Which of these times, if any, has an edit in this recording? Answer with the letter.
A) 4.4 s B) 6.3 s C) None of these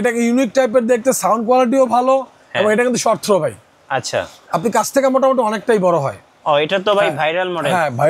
B